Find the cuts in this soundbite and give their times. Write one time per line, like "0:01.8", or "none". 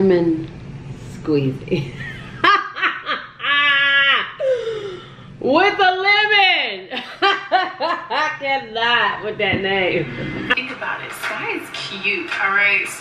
0:10.5